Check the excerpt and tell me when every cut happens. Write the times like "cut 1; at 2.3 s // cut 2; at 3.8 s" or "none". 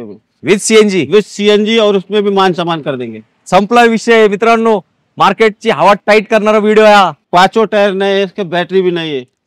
cut 1; at 7.2 s